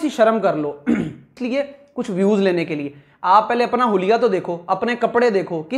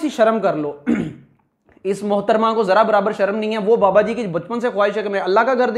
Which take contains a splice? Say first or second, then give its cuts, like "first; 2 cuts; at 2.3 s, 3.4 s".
first; 1 cut; at 1.3 s